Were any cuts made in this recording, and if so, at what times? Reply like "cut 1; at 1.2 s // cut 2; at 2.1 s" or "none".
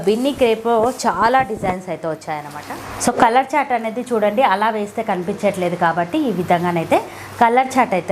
cut 1; at 2.6 s